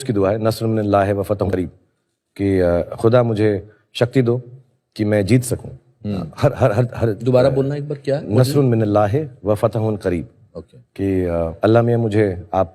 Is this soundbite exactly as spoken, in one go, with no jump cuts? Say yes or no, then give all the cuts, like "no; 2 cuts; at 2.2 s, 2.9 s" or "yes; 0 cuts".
no; 1 cut; at 1.5 s